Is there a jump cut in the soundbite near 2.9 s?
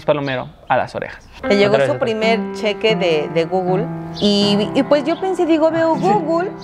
no; 1 cut; at 1.2 s

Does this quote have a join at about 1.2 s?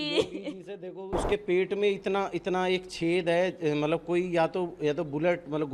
yes; 1 cut; at 1.2 s

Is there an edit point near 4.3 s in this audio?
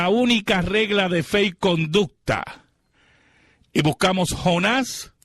no; 1 cut; at 1.9 s

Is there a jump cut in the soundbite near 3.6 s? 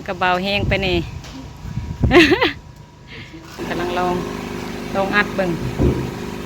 yes; 1 cut; at 3.6 s

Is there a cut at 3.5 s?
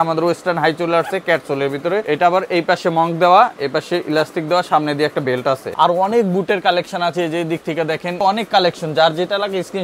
no; 3 cuts; at 2.0 s, 5.7 s, 8.2 s

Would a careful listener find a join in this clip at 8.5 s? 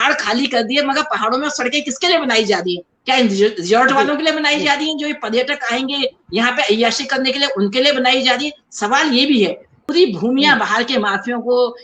no; 1 cut; at 9.7 s

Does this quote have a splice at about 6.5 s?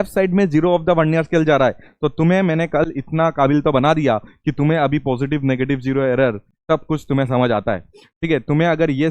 yes; 1 cut; at 6.5 s

